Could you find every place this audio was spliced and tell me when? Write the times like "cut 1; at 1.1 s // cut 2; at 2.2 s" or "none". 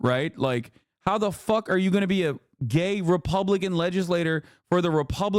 none

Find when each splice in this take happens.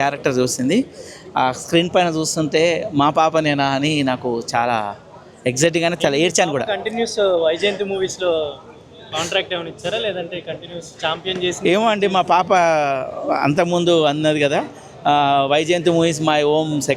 none

